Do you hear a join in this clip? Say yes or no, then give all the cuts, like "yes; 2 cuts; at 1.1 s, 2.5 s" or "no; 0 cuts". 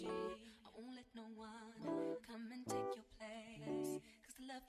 yes; 1 cut; at 3.4 s